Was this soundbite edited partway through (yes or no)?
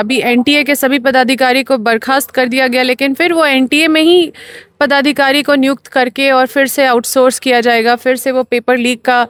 no